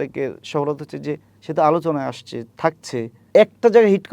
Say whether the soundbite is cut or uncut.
cut